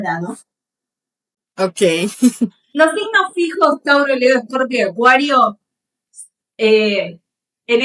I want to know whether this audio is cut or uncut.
uncut